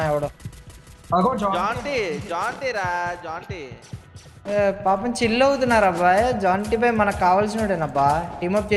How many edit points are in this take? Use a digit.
0